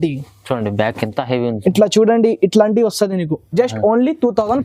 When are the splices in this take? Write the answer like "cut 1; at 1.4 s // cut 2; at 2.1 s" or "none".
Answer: none